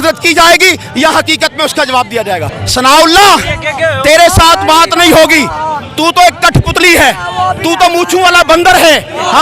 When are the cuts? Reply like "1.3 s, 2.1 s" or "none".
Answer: 2.5 s